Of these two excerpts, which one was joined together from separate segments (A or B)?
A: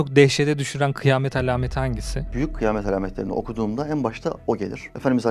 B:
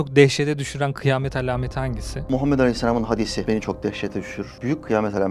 A